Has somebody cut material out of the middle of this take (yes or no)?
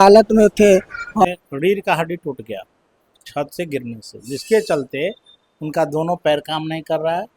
yes